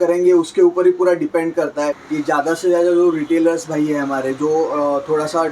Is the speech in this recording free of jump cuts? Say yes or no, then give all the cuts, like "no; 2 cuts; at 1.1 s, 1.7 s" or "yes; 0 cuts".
no; 1 cut; at 2.0 s